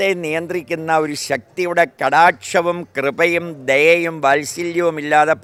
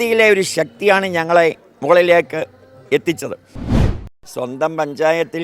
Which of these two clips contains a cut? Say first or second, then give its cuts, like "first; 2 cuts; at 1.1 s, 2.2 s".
second; 1 cut; at 3.8 s